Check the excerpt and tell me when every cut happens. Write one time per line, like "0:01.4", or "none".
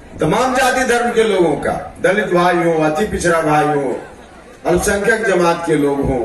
none